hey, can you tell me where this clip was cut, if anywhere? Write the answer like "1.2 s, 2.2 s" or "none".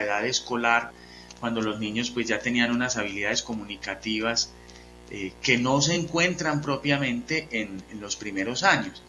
none